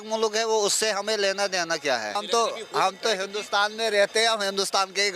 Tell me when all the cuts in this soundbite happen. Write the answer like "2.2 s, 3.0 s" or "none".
2.2 s